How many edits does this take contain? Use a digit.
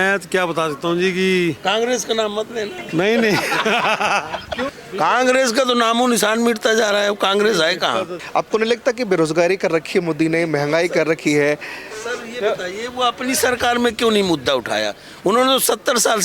2